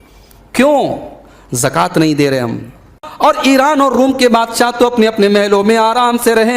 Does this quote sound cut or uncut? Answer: cut